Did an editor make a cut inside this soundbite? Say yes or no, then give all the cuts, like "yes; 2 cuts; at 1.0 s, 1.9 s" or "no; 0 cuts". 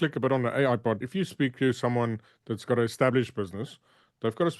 yes; 1 cut; at 1.0 s